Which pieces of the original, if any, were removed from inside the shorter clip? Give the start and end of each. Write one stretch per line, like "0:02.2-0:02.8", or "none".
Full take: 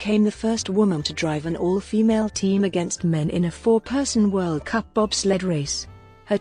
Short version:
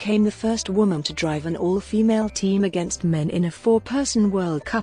none